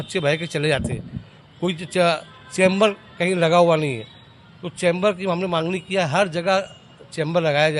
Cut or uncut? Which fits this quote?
uncut